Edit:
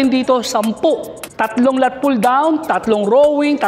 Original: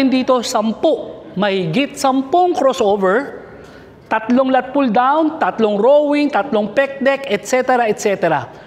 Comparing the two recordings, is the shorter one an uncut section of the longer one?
no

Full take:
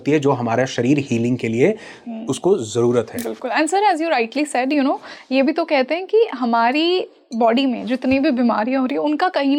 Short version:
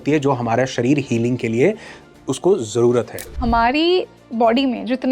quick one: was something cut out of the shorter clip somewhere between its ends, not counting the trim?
yes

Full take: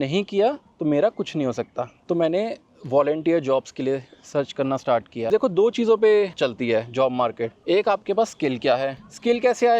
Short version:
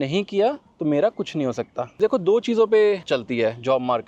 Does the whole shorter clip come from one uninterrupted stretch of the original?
no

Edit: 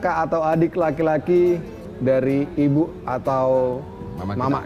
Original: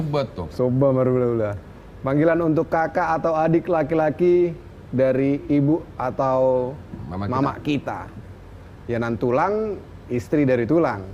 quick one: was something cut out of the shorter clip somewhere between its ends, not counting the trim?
no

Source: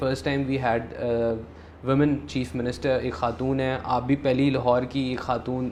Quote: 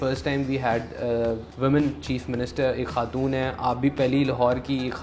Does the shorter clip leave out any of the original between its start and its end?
yes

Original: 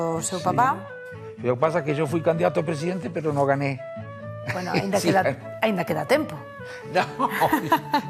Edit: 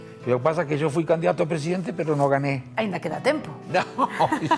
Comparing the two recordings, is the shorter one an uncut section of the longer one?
no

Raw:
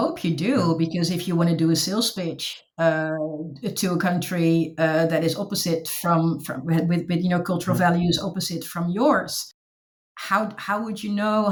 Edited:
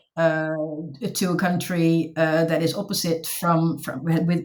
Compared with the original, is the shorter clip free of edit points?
yes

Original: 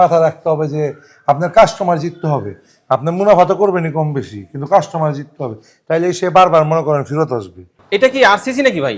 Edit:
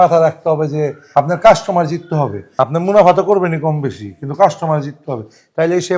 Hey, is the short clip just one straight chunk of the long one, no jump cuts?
no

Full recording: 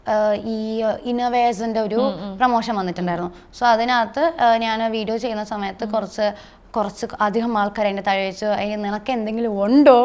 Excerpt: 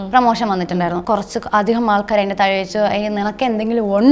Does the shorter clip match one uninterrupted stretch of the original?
no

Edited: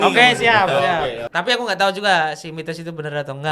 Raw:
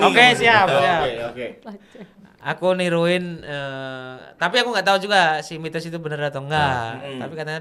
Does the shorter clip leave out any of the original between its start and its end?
yes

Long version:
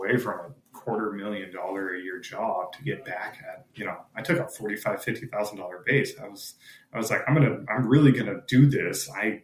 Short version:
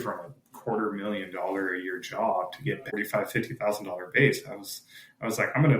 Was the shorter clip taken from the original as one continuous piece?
no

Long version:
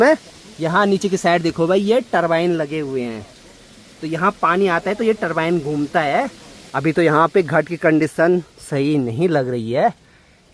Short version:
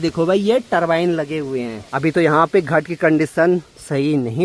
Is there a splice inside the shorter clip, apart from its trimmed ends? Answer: yes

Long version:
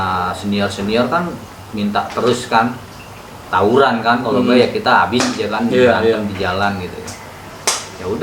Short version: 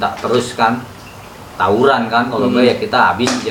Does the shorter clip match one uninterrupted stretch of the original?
yes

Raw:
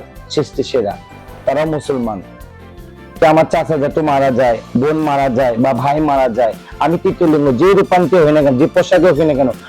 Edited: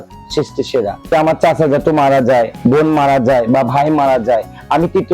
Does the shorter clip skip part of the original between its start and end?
yes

